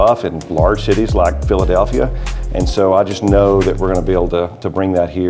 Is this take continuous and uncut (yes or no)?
yes